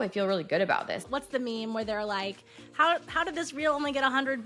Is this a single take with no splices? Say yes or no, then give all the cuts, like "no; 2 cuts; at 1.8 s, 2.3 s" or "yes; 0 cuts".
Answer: no; 1 cut; at 1.0 s